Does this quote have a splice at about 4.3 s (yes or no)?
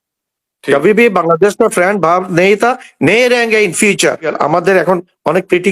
yes